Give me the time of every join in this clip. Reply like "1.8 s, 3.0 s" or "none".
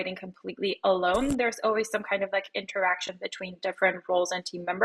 none